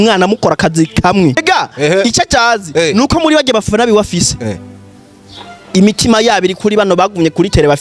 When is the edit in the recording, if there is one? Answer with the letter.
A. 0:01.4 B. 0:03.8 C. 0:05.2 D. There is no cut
A